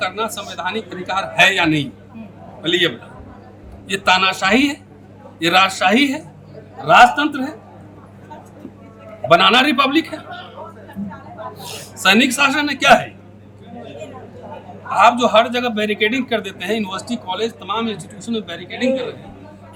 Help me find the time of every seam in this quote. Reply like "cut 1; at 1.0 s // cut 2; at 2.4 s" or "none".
none